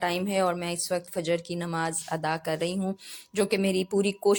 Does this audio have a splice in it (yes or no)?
no